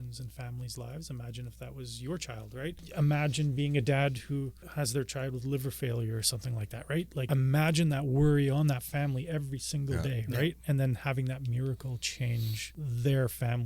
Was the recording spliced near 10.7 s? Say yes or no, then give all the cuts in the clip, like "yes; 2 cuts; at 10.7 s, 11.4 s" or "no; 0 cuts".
no; 4 cuts; at 2.8 s, 4.6 s, 7.3 s, 12.6 s